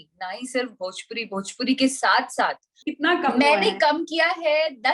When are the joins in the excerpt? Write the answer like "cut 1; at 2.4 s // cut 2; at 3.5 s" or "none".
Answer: cut 1; at 2.9 s